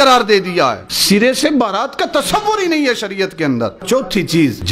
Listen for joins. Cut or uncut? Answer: cut